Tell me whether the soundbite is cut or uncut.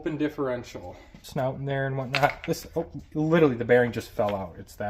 cut